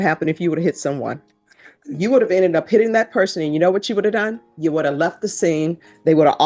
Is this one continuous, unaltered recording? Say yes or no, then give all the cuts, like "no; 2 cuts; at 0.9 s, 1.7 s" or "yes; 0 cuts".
yes; 0 cuts